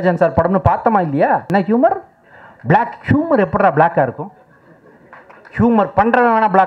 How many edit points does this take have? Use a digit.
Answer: 1